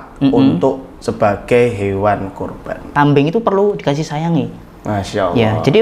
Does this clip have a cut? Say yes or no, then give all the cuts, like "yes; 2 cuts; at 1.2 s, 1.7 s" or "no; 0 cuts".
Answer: yes; 1 cut; at 2.9 s